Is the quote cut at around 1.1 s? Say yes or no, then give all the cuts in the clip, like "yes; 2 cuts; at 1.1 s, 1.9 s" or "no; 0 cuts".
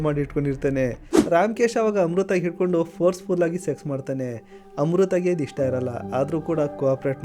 yes; 1 cut; at 1.1 s